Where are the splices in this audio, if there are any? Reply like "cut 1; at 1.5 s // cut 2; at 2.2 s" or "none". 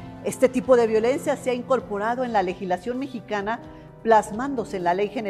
cut 1; at 3.8 s